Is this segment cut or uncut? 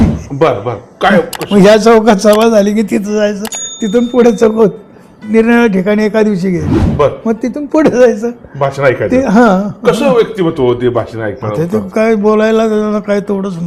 uncut